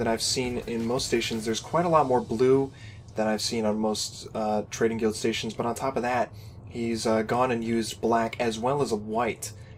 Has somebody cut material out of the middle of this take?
no; 0 cuts

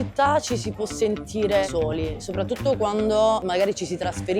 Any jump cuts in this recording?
yes; 2 cuts; at 1.7 s, 3.4 s

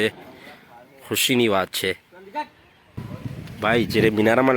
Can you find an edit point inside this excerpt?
yes; 1 cut; at 3.0 s

